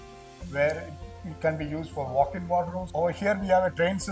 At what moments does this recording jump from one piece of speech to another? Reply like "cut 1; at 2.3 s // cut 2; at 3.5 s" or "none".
cut 1; at 2.8 s